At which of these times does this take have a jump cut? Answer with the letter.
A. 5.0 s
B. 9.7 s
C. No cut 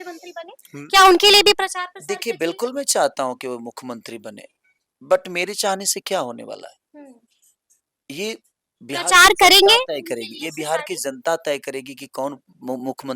C